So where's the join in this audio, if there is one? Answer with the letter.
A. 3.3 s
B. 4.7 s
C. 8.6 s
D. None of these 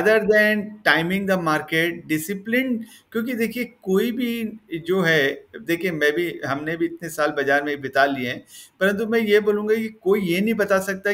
D